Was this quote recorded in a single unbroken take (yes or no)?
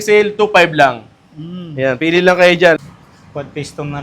no